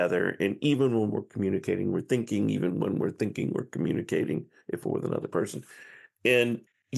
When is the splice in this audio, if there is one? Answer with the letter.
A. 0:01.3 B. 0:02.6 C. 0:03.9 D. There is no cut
D